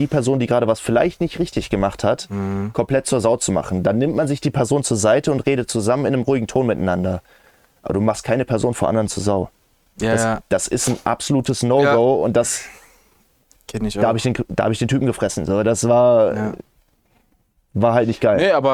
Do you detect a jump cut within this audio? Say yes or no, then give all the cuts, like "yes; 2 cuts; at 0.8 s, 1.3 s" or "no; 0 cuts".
no; 0 cuts